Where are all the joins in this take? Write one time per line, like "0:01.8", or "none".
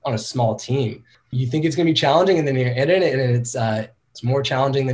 0:01.1